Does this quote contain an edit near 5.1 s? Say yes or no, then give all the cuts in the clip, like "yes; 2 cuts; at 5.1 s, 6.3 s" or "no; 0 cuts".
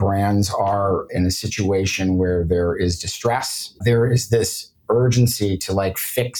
no; 2 cuts; at 1.1 s, 3.8 s